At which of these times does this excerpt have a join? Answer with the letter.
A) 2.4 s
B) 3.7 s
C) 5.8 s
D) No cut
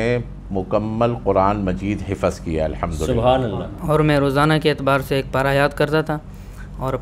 B